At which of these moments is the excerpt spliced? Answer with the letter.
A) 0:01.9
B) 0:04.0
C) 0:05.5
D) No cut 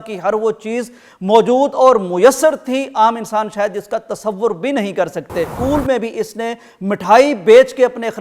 C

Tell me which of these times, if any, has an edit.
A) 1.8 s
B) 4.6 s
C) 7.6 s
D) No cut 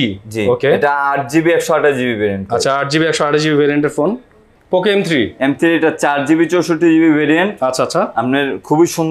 B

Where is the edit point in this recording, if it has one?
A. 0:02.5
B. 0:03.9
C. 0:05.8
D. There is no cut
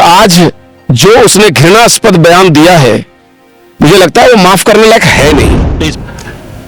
C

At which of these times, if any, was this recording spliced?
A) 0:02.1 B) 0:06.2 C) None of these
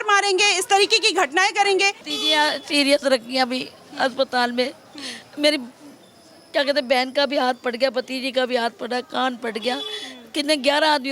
A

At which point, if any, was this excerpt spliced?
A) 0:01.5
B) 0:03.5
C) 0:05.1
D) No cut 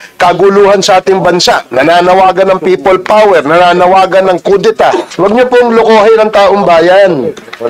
C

